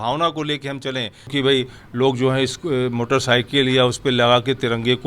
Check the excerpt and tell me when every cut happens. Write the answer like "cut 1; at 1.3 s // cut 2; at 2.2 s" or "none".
cut 1; at 1.3 s